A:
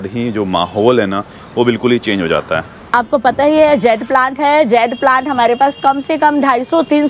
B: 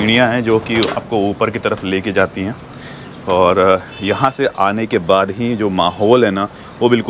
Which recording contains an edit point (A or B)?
A